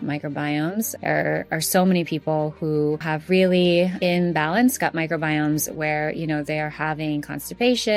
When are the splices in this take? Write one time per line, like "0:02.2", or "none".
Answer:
0:00.9
0:03.1
0:03.9